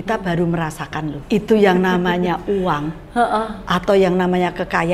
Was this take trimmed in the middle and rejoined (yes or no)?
yes